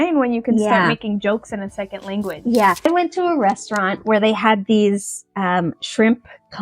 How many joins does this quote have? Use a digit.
1